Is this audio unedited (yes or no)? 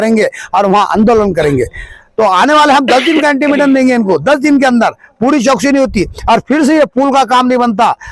yes